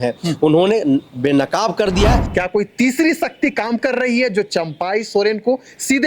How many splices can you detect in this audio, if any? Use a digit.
1